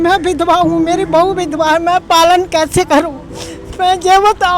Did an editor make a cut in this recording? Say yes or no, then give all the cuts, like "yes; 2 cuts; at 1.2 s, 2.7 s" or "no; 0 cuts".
no; 0 cuts